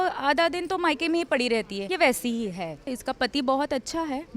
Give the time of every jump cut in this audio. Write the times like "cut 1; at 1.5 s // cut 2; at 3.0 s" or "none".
cut 1; at 1.8 s // cut 2; at 2.9 s

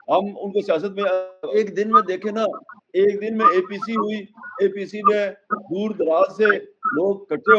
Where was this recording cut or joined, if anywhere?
cut 1; at 1.5 s

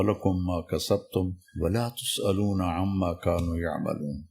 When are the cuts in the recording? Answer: cut 1; at 1.4 s

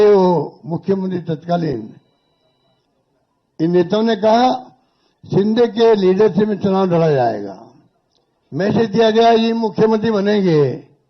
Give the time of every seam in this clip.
none

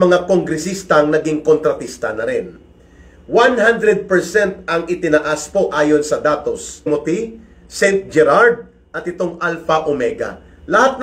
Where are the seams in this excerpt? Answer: cut 1; at 6.9 s

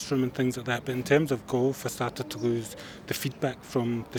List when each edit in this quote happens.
none

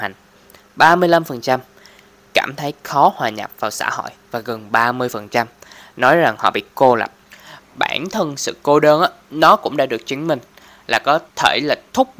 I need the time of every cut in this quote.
cut 1; at 11.3 s

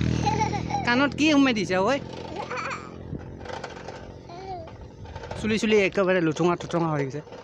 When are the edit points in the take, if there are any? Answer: none

